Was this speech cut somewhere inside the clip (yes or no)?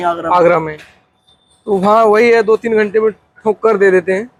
no